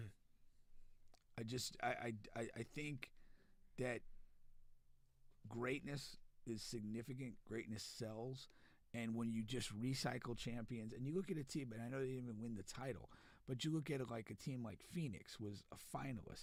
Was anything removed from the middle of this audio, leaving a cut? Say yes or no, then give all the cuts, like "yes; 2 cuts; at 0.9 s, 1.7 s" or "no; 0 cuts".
no; 0 cuts